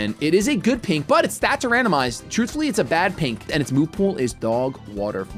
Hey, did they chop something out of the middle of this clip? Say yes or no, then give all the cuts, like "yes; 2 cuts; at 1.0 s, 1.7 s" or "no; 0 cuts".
yes; 2 cuts; at 2.3 s, 3.5 s